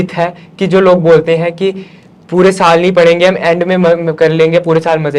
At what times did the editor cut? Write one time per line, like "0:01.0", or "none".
none